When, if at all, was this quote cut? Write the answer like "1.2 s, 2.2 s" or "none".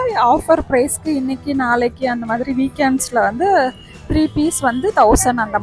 none